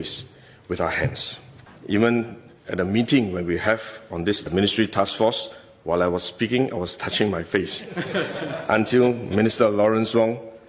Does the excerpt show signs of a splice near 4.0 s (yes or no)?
no